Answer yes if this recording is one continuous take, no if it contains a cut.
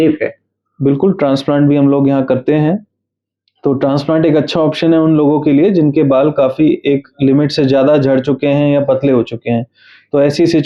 yes